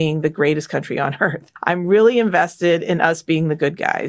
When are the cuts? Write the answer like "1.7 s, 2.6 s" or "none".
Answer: 1.5 s